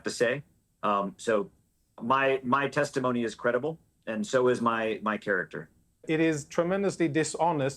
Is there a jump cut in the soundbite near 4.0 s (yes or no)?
no